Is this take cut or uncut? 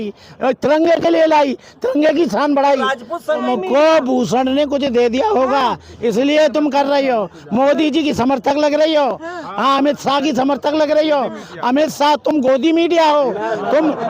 cut